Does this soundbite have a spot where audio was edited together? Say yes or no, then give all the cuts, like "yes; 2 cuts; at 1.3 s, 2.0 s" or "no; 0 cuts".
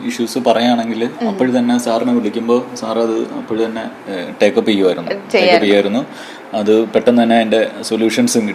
no; 0 cuts